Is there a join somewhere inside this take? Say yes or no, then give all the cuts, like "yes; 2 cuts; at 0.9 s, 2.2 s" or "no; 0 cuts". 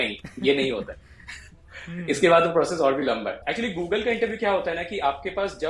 yes; 1 cut; at 3.4 s